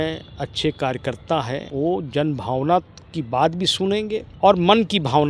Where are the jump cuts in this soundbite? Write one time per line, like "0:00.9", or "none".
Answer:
0:01.7
0:04.3